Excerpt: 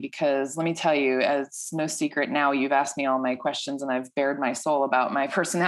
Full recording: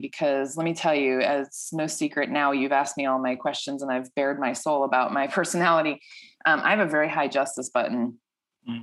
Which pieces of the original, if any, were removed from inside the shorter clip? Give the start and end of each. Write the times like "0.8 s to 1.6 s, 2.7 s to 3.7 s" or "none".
none